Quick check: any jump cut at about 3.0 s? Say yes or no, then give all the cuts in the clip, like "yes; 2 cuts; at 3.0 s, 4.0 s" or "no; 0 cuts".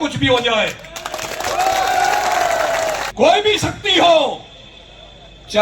yes; 1 cut; at 3.0 s